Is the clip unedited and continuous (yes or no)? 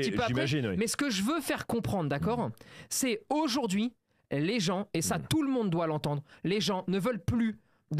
yes